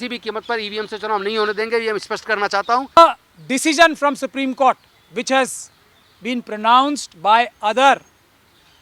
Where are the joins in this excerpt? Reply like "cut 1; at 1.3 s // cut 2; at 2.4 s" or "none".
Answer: cut 1; at 3.0 s